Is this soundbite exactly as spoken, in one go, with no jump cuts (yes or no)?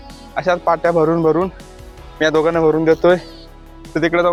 yes